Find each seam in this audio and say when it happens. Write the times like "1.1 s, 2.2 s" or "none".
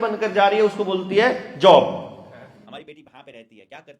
2.6 s